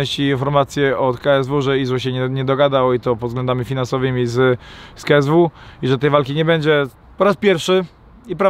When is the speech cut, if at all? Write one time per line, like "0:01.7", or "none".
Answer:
0:07.0